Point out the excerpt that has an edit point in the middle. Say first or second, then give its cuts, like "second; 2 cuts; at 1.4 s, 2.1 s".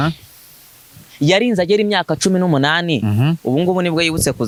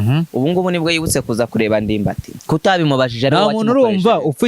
second; 1 cut; at 2.3 s